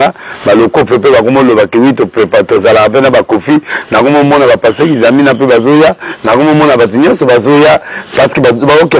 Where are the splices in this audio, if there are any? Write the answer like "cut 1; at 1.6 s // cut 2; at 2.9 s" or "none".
none